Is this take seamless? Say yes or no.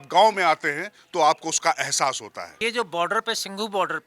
no